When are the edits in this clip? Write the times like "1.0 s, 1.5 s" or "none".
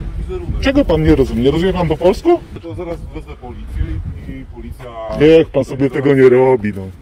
2.6 s